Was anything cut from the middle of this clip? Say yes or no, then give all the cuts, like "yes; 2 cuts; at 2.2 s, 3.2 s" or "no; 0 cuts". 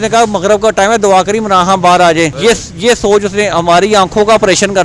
yes; 1 cut; at 2.3 s